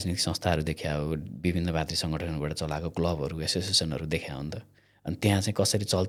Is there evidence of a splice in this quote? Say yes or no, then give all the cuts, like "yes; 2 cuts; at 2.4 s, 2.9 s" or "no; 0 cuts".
no; 0 cuts